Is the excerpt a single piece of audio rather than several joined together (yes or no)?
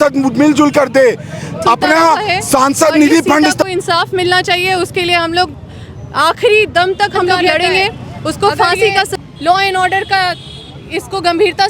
no